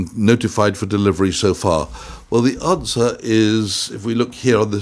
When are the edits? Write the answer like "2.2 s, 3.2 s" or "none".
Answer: none